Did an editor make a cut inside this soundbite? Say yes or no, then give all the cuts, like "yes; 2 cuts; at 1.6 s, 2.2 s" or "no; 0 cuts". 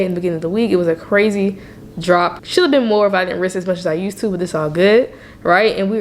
no; 0 cuts